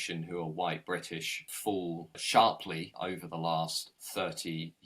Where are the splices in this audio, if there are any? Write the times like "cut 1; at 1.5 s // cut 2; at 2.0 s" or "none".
cut 1; at 1.6 s // cut 2; at 2.9 s // cut 3; at 4.0 s